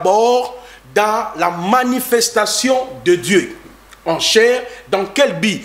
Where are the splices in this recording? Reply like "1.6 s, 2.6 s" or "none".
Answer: none